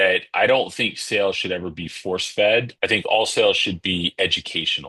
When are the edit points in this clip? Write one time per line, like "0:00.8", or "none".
0:02.7